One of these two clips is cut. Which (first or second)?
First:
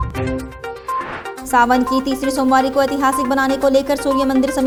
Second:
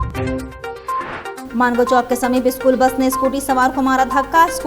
second